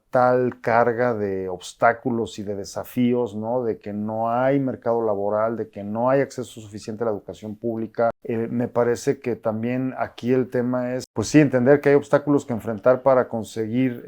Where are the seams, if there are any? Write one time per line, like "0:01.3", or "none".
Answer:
0:08.2
0:11.1